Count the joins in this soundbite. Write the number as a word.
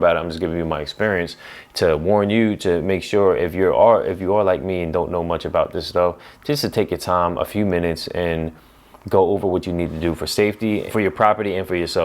one